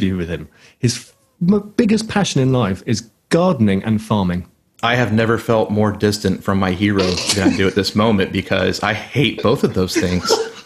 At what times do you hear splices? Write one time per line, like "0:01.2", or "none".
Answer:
none